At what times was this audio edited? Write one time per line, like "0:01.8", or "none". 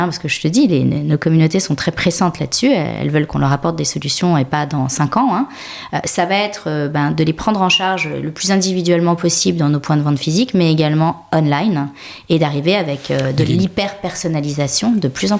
none